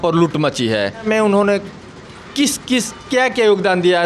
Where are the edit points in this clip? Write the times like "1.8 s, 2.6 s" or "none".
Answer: 1.0 s